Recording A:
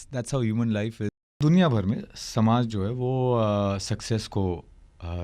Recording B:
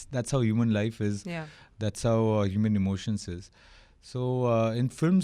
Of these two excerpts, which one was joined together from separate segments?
A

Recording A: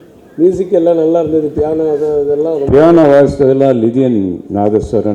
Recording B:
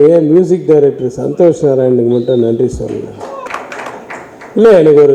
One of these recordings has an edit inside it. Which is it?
B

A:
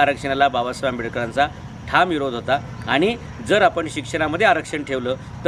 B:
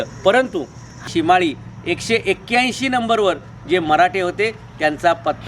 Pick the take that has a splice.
B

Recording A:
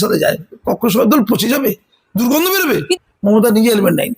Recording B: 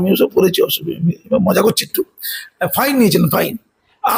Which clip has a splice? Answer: A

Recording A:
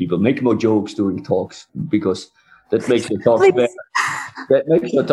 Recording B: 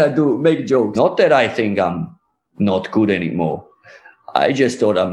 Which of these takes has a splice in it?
B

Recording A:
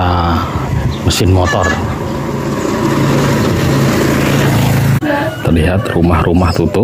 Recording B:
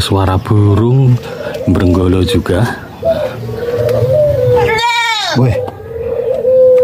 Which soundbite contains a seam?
A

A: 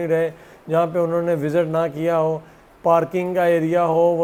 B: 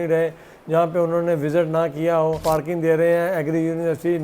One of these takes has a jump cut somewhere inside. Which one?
B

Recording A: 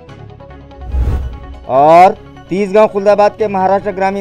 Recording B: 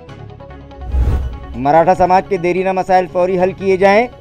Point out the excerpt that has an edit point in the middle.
A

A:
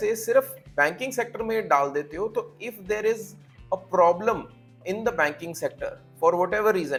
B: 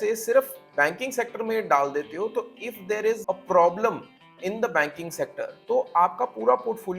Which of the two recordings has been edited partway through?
B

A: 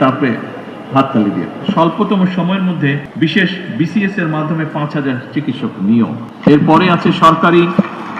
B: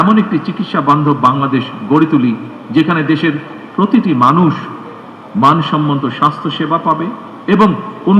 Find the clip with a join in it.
A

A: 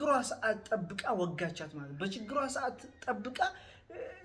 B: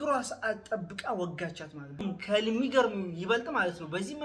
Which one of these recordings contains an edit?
B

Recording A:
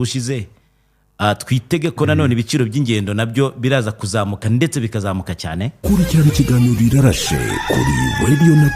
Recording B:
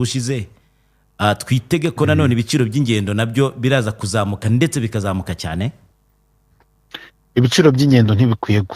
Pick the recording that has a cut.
A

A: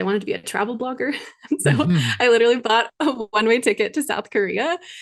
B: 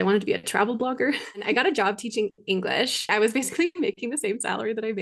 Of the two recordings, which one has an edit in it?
B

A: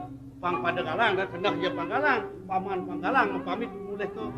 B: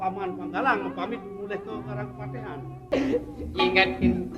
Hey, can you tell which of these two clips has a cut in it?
B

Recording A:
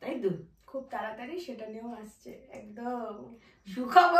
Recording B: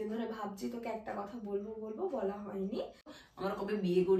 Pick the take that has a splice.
B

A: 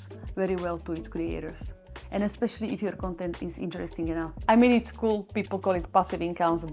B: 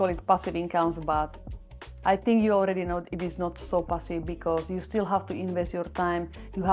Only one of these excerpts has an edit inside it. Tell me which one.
A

